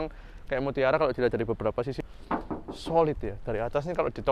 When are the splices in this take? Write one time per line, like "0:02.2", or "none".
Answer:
0:02.0